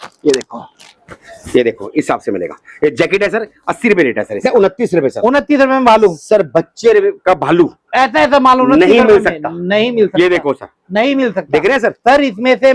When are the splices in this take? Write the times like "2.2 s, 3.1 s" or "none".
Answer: 4.4 s